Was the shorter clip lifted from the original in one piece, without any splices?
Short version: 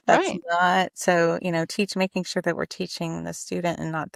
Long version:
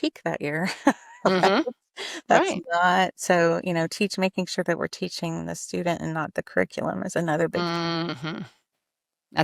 yes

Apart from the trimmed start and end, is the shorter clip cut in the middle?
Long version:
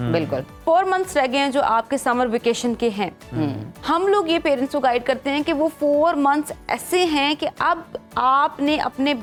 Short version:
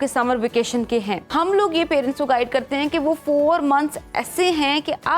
yes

